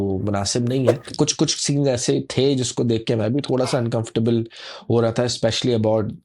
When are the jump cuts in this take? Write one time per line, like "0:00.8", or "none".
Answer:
0:01.1